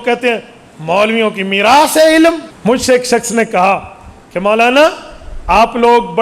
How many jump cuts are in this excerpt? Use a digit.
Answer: 1